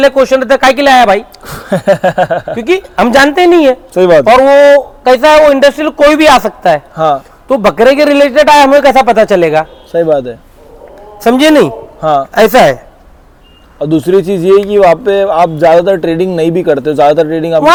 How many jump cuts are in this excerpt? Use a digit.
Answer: 0